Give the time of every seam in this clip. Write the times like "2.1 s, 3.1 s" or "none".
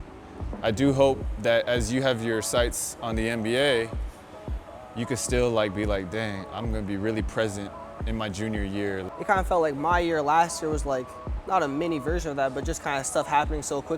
9.0 s